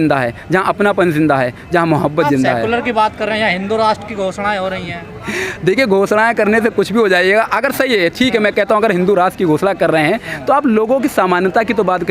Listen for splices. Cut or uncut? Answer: uncut